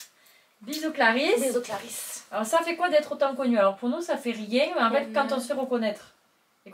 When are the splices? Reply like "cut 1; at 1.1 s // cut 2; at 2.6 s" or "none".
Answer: none